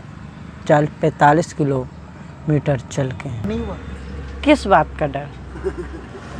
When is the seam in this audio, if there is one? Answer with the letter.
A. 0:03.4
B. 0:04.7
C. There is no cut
A